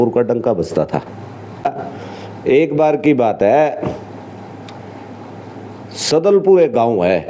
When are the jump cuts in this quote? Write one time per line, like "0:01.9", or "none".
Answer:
0:01.6